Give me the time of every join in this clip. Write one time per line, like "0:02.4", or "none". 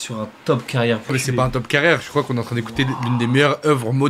0:01.1